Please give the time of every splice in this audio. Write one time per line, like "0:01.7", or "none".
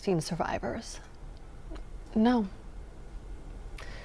none

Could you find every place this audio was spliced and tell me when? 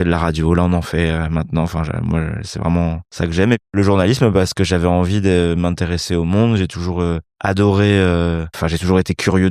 0:03.5
0:07.3
0:08.6

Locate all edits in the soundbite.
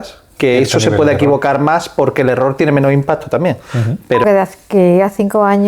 0:04.2

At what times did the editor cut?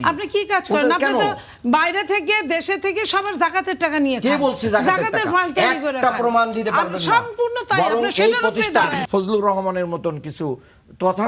0:09.0

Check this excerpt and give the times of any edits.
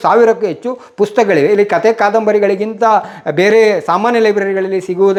none

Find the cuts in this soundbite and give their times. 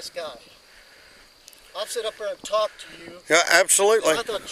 none

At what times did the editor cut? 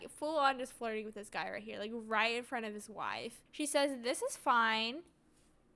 0:03.4

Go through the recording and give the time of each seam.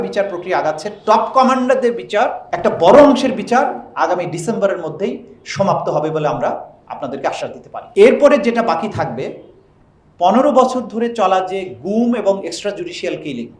none

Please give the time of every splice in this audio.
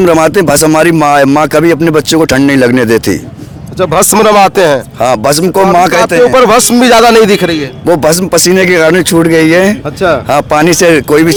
none

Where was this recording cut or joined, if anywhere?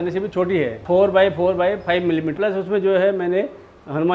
0:00.8
0:02.3

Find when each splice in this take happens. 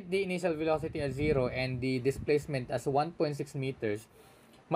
none

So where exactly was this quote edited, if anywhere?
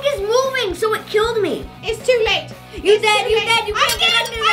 0:01.7

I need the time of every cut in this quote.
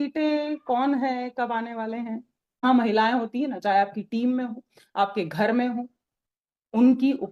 0:02.6

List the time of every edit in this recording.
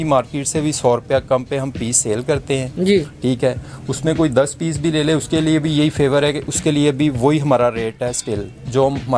none

